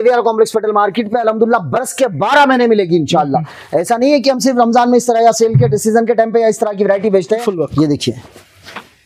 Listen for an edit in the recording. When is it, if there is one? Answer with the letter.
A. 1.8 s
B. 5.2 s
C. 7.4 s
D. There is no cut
C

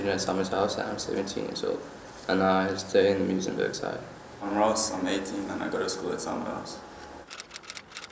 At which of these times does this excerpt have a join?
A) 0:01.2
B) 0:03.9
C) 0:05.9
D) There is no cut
A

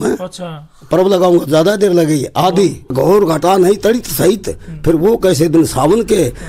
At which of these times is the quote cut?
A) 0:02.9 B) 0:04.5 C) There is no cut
A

